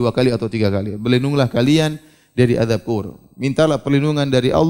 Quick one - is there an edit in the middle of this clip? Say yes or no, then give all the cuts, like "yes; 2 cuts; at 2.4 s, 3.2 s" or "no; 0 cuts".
no; 0 cuts